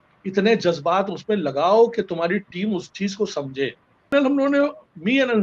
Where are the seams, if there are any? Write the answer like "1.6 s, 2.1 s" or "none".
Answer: 4.1 s